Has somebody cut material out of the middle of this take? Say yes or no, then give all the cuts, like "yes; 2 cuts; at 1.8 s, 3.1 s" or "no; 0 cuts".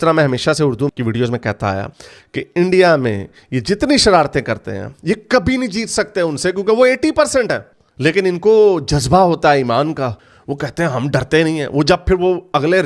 no; 0 cuts